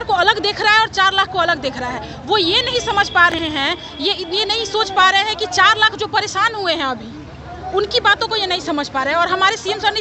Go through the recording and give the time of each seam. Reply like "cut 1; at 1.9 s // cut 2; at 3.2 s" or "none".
none